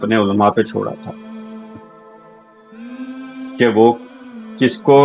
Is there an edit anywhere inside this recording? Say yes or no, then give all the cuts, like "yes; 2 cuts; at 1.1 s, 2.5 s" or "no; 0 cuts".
no; 0 cuts